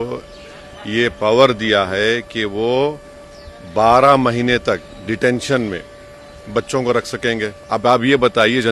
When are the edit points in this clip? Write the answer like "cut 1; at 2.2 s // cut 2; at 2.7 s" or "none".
cut 1; at 7.6 s